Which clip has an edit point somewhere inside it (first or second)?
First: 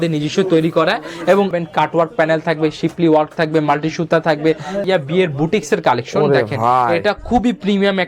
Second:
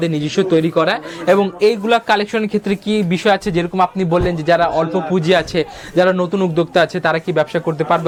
first